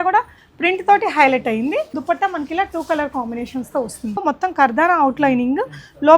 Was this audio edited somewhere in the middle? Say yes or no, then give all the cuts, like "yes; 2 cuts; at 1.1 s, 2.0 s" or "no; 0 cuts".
yes; 2 cuts; at 1.9 s, 4.2 s